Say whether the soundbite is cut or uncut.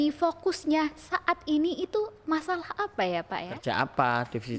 cut